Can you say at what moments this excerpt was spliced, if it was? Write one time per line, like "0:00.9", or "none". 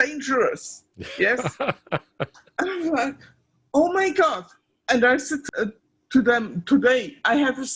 0:05.4